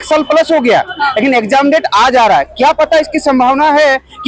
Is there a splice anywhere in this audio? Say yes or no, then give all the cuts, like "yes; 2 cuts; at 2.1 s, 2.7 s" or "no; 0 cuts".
no; 0 cuts